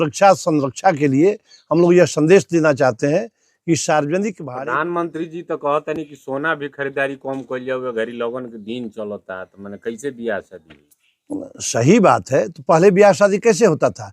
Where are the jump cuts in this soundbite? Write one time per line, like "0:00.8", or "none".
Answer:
none